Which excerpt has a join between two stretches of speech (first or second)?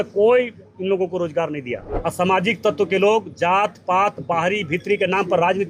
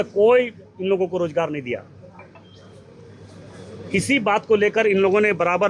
first